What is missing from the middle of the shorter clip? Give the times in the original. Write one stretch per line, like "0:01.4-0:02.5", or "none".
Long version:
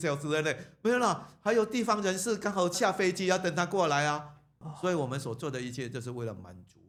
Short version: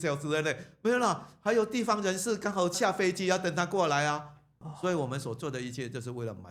none